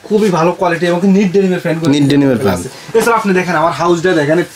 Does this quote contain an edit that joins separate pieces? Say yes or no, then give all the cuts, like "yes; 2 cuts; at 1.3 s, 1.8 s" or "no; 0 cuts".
no; 0 cuts